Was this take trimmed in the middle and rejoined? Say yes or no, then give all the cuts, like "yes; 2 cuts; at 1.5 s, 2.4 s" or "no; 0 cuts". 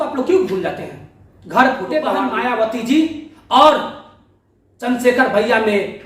yes; 1 cut; at 2.3 s